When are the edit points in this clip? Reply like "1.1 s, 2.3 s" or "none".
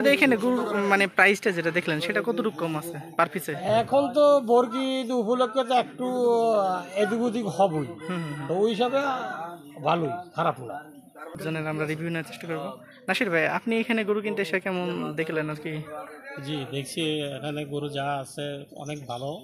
11.3 s